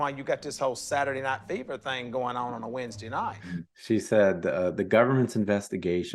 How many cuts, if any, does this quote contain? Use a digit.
1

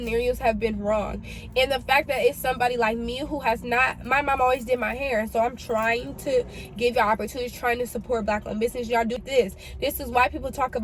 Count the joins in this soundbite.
1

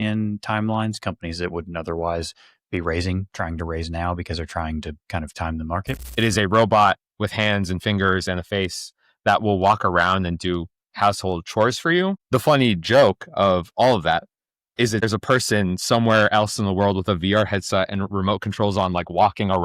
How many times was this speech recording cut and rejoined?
3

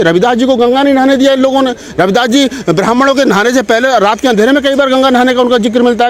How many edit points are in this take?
0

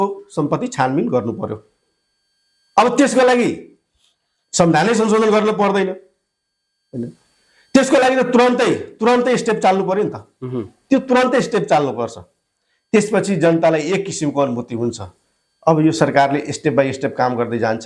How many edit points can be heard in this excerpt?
0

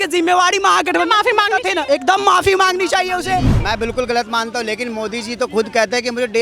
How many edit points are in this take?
2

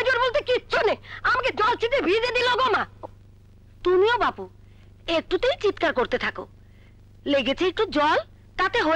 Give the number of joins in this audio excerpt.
0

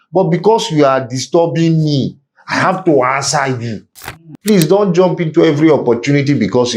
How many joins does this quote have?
1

